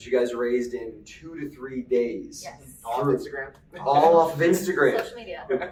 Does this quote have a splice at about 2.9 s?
no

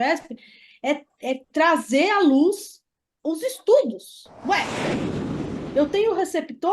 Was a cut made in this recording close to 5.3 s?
yes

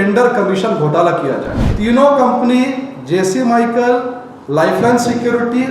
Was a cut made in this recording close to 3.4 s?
no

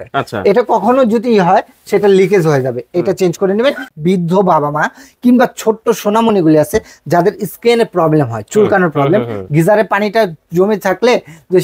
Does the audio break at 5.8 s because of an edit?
no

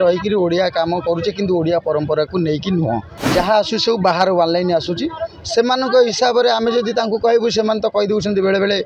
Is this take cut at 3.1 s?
yes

